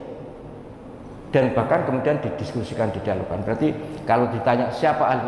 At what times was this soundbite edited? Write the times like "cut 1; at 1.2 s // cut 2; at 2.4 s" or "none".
none

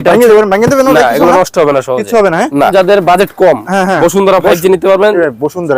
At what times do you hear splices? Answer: cut 1; at 2.7 s

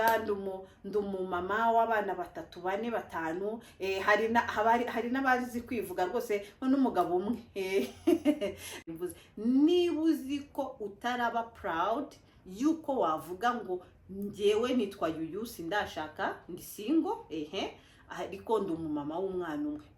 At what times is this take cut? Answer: cut 1; at 8.8 s

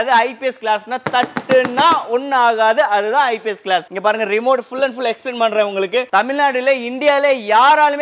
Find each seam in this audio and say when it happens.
cut 1; at 3.9 s // cut 2; at 6.1 s

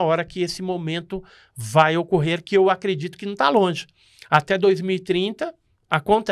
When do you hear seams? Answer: none

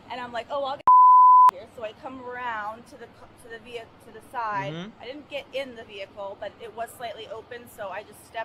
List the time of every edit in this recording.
none

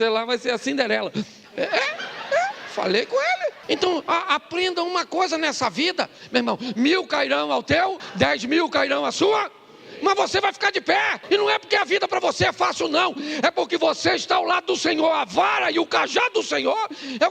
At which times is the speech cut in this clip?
cut 1; at 3.6 s // cut 2; at 8.0 s // cut 3; at 11.2 s

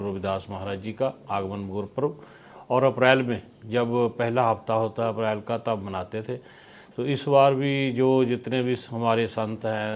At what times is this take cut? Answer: none

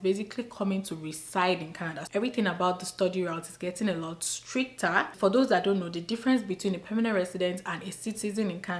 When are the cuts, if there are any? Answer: cut 1; at 2.1 s // cut 2; at 5.1 s

